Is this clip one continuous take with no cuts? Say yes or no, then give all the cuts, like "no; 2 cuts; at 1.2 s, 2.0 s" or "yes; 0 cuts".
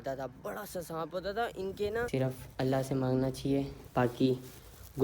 no; 1 cut; at 2.1 s